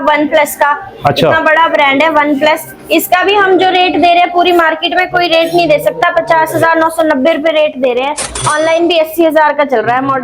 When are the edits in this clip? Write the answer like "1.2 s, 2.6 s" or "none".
none